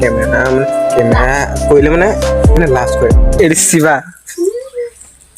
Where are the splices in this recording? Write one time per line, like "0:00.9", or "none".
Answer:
0:03.4